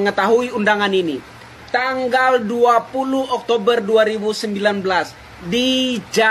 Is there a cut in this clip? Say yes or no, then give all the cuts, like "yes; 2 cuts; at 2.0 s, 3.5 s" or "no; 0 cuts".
no; 0 cuts